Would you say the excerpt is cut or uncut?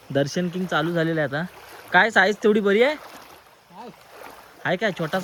uncut